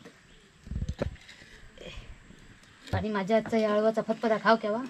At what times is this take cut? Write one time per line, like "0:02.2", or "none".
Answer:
0:03.0